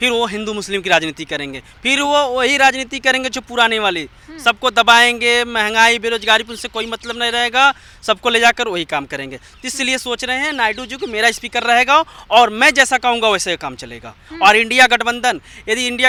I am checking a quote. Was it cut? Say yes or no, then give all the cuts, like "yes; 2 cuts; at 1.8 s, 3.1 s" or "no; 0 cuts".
no; 0 cuts